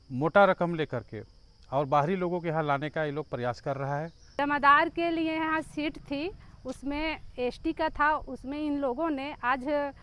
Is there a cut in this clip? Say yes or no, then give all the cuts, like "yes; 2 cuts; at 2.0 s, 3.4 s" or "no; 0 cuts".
yes; 1 cut; at 4.4 s